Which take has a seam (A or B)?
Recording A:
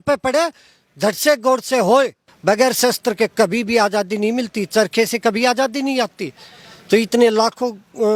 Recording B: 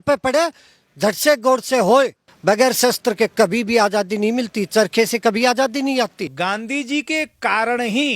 B